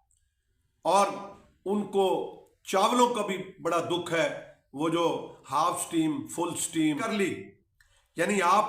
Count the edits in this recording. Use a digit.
1